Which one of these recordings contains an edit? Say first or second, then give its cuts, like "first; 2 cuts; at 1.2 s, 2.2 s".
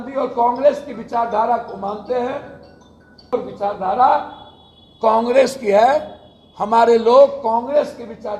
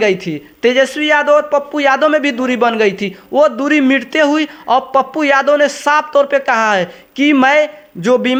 first; 1 cut; at 3.3 s